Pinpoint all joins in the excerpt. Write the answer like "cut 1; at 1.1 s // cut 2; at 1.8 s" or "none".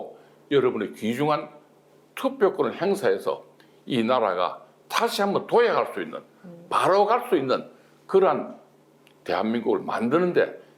none